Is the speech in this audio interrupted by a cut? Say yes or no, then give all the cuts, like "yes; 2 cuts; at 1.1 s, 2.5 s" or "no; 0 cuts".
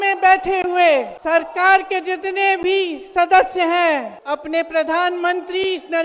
yes; 2 cuts; at 1.1 s, 4.1 s